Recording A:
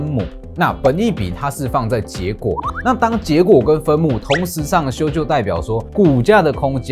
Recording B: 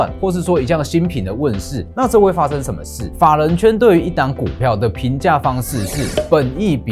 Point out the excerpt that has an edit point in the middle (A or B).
B